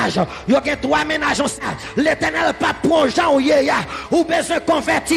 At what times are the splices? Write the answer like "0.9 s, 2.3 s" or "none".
1.6 s